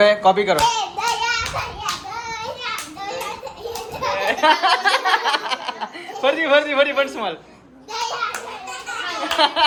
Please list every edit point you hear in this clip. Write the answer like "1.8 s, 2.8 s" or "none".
none